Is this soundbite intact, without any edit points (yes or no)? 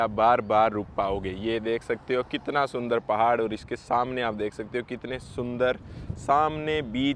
yes